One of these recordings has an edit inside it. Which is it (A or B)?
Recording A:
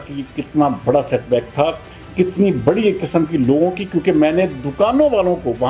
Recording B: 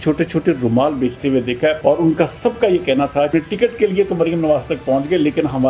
B